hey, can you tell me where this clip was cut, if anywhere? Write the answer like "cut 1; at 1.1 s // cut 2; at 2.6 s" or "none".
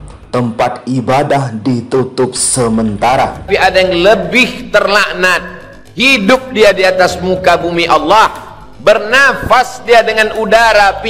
cut 1; at 3.4 s